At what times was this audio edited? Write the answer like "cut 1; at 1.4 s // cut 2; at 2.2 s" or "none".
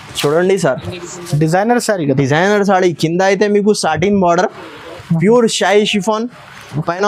none